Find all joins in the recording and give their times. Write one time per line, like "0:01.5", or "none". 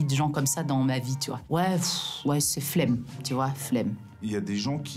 0:01.5
0:04.1